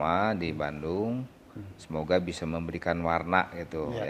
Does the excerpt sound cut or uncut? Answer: uncut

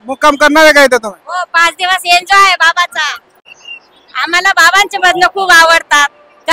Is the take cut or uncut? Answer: cut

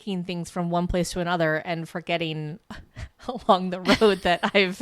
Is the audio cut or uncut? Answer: uncut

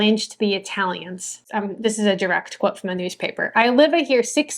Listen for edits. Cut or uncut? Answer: cut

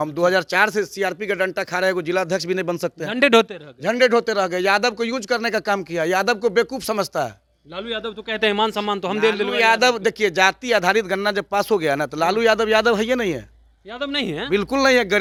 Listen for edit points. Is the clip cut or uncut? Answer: uncut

